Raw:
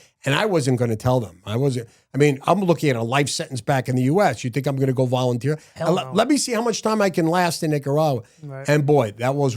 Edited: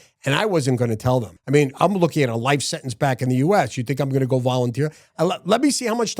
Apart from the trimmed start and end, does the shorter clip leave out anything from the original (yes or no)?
yes